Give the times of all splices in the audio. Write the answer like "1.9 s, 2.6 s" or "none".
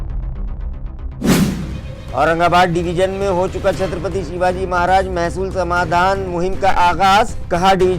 1.9 s